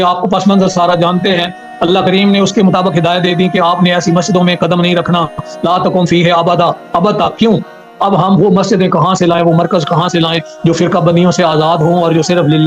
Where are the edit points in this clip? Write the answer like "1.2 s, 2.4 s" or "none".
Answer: 7.8 s